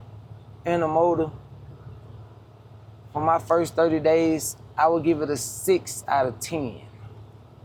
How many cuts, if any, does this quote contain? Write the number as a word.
zero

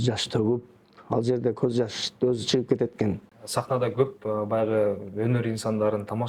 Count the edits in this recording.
one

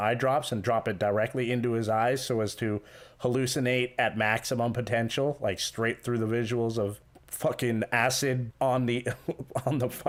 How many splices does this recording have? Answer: zero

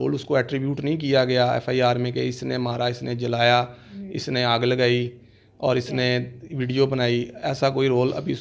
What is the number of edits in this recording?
zero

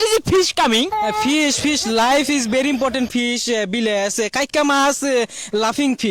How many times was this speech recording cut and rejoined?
zero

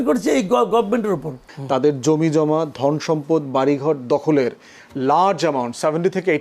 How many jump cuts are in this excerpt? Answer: one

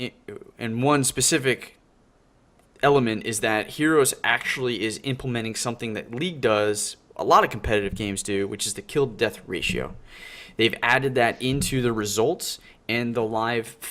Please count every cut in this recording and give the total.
one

